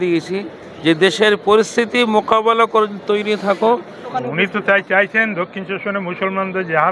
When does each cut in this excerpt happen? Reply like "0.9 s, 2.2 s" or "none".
4.0 s